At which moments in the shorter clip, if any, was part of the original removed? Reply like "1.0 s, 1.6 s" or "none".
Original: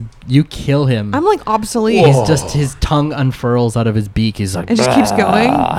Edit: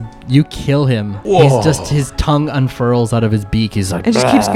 1.1 s